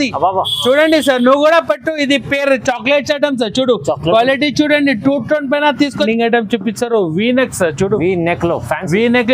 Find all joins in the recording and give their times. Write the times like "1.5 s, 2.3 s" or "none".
6.1 s